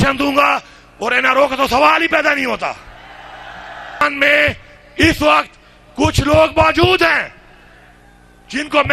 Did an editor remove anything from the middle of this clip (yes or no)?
yes